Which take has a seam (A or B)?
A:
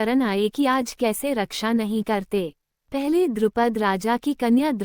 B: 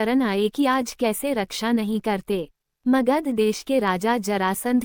A